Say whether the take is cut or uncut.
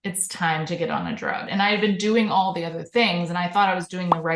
cut